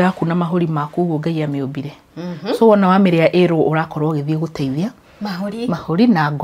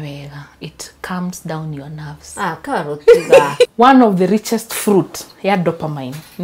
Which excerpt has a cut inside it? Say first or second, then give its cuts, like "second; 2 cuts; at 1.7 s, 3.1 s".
second; 1 cut; at 3.7 s